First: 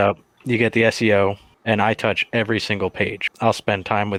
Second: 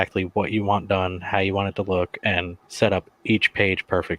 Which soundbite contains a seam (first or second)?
second